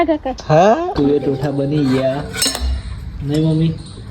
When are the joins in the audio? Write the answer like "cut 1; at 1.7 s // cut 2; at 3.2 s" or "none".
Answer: cut 1; at 0.9 s